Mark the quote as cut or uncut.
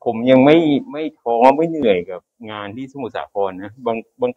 uncut